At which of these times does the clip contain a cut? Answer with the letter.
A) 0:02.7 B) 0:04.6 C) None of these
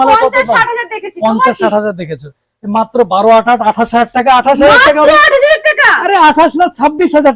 C